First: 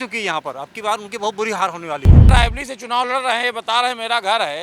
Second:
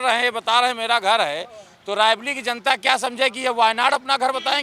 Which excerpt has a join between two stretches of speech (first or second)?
first